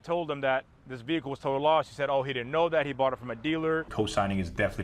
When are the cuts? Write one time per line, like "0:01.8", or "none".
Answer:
0:03.9